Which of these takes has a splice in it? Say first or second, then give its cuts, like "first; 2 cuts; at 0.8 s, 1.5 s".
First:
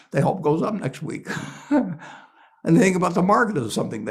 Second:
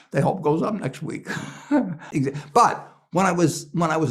second; 1 cut; at 2.0 s